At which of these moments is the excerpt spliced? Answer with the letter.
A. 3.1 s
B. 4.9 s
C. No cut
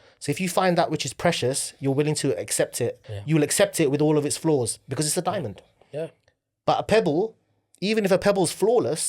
A